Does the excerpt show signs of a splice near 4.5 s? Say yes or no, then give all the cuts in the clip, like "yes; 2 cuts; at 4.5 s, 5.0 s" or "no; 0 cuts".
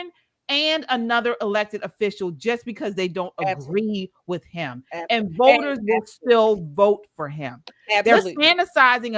no; 0 cuts